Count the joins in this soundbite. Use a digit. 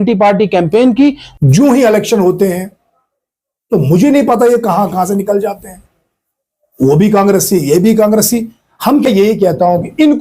2